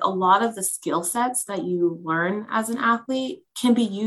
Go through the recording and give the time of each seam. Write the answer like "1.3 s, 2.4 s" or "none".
none